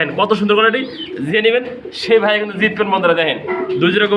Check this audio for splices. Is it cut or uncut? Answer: uncut